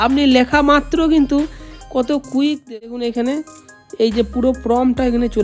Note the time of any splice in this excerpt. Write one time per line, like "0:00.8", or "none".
0:02.6